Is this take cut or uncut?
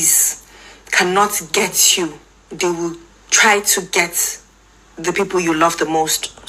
uncut